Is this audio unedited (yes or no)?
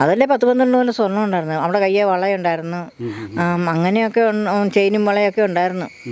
yes